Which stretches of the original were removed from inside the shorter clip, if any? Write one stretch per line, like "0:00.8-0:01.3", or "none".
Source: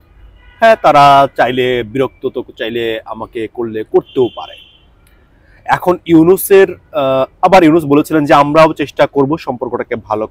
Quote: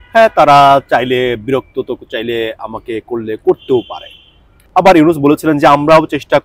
0:05.1-0:07.3